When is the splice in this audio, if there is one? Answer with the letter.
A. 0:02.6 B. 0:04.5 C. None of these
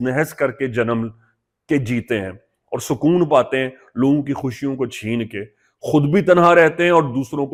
C